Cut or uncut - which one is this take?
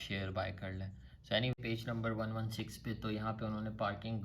cut